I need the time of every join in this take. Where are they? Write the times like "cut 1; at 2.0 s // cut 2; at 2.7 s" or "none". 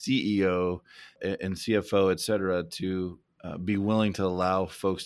cut 1; at 1.1 s // cut 2; at 3.2 s

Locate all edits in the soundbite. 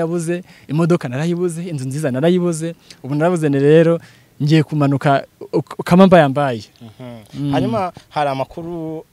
none

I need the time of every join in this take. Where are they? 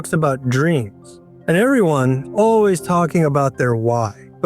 cut 1; at 2.3 s

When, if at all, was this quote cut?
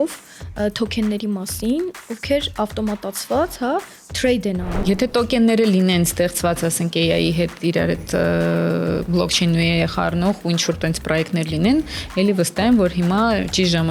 cut 1; at 4.8 s

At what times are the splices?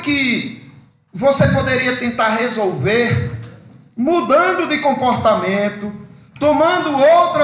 none

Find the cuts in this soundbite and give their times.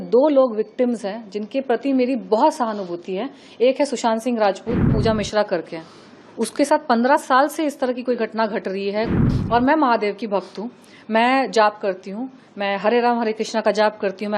cut 1; at 4.9 s // cut 2; at 9.2 s

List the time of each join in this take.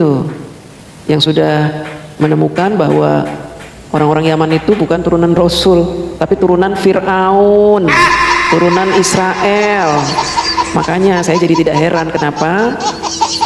none

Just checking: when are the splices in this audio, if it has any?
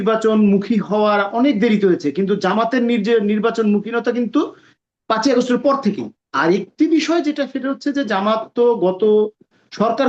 none

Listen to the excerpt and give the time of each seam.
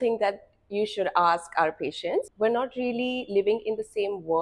cut 1; at 2.3 s

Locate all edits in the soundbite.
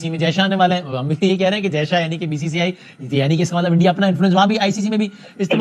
none

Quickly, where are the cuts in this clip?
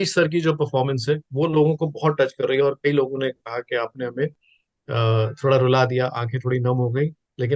none

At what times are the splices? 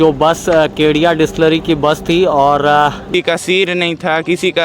cut 1; at 3.1 s

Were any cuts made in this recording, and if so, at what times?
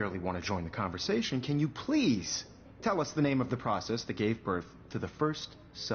cut 1; at 1.1 s

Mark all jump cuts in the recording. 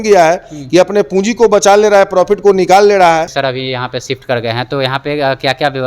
cut 1; at 3.3 s

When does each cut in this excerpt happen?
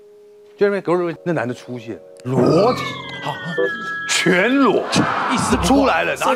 cut 1; at 1.2 s

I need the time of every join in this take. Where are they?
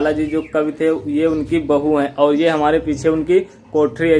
none

